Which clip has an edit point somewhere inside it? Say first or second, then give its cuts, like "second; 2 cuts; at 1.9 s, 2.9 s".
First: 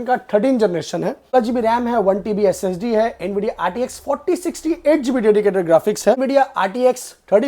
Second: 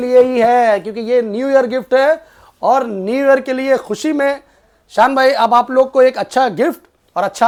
first; 2 cuts; at 1.4 s, 6.2 s